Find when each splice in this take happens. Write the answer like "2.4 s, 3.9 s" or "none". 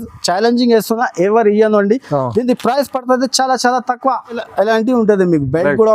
4.4 s